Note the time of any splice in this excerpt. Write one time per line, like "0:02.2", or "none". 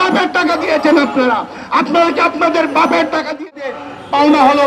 0:03.5